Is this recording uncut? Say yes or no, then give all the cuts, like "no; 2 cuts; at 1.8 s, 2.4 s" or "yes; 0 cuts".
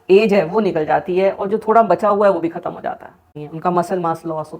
no; 1 cut; at 3.2 s